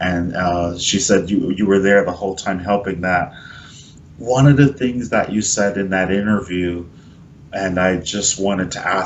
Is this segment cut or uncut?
cut